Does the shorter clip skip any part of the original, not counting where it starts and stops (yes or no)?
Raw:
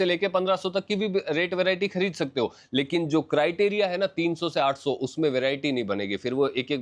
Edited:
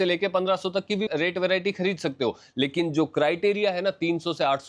yes